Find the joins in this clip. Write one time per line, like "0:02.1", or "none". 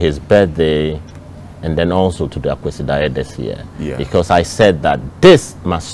none